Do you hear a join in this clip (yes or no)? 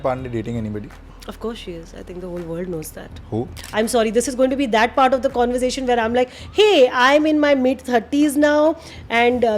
yes